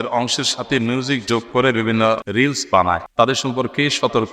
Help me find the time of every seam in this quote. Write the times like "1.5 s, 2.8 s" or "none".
2.3 s, 3.1 s